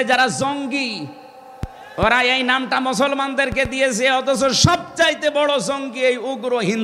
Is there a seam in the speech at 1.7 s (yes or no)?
no